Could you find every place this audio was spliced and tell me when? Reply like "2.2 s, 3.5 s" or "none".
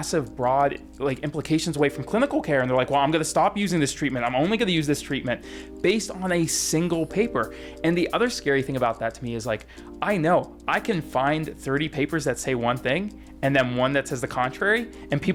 none

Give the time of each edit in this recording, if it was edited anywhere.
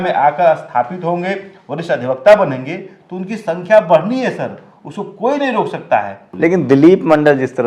6.2 s

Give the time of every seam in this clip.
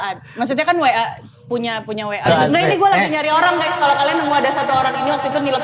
2.2 s

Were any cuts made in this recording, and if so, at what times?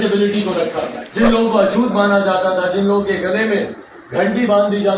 1.0 s

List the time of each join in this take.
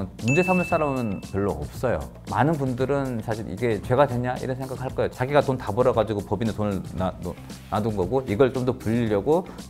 2.2 s

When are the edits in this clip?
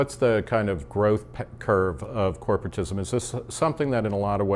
2.0 s

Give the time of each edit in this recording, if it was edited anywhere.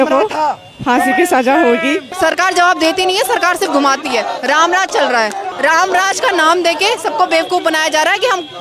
2.1 s, 5.5 s

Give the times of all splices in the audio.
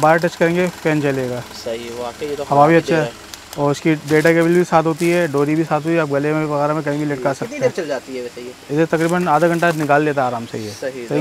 none

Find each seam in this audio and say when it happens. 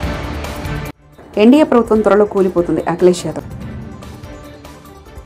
1.0 s

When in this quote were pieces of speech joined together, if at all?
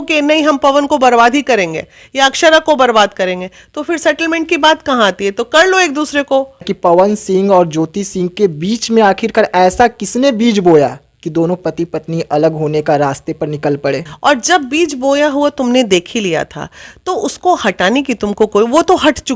6.7 s, 14.1 s

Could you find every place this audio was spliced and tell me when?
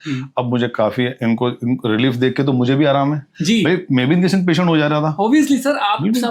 none

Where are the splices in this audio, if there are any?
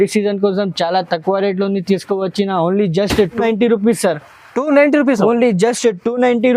3.4 s

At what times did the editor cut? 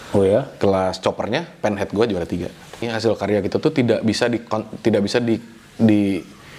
2.8 s

